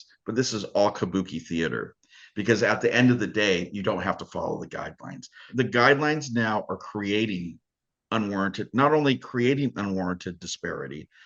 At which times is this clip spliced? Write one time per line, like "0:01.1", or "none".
0:05.4